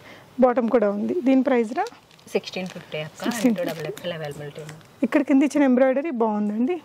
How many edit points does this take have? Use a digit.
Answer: 0